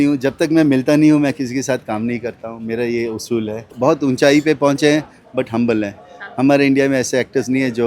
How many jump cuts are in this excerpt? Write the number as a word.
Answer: one